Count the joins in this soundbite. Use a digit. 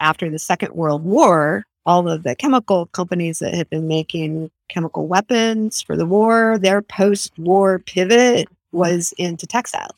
0